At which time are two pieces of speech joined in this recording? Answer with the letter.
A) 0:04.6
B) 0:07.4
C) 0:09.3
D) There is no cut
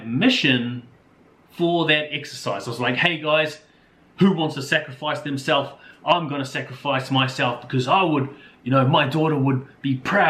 D